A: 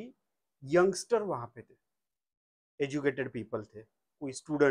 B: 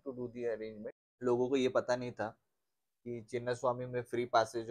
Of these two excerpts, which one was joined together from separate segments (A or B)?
B